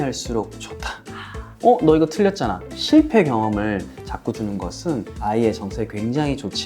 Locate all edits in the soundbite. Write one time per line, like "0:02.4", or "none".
0:01.5
0:02.6
0:04.4